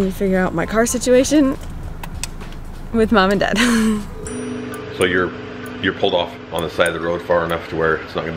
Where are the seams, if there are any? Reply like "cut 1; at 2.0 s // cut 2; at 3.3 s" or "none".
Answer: none

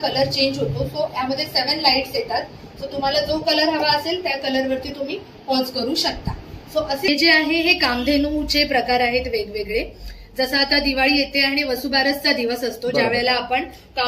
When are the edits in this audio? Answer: cut 1; at 7.1 s

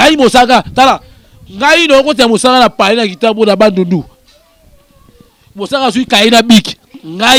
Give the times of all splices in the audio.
none

